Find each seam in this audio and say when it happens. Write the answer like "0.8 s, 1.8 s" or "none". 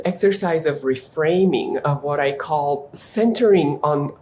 3.0 s